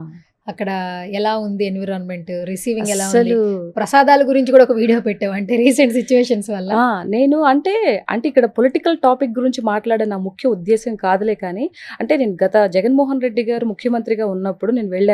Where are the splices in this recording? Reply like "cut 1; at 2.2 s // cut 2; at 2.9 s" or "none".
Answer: none